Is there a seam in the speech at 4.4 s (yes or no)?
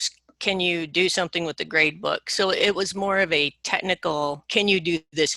yes